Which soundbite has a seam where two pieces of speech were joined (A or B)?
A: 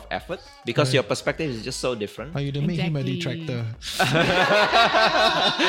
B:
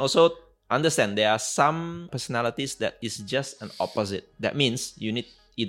B